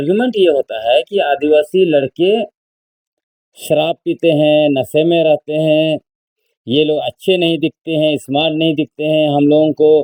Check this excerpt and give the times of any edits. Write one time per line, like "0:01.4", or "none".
none